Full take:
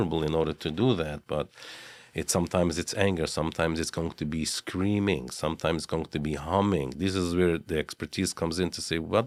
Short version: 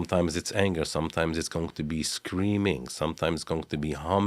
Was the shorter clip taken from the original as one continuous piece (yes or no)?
yes